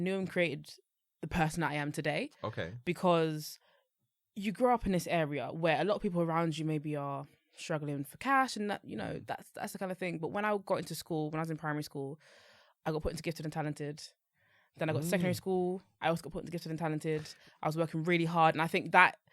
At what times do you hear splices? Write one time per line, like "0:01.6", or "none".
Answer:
none